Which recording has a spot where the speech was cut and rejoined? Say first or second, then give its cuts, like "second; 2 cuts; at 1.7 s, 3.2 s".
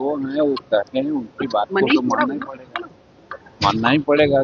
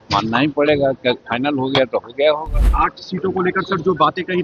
second; 1 cut; at 2.6 s